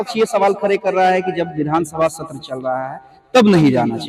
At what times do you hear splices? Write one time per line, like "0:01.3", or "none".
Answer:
none